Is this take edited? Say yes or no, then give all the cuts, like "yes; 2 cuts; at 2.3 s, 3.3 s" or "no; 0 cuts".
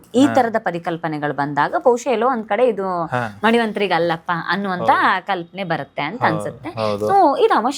no; 0 cuts